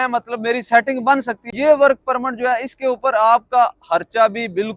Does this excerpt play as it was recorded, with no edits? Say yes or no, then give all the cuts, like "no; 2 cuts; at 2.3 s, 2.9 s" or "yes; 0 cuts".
no; 1 cut; at 1.5 s